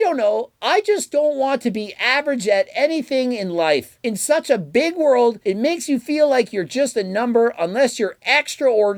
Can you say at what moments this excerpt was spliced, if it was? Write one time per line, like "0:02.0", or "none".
none